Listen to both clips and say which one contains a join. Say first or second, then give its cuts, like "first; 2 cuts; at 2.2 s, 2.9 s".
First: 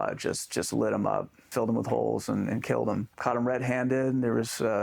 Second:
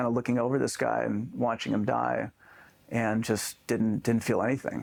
first; 2 cuts; at 1.4 s, 3.1 s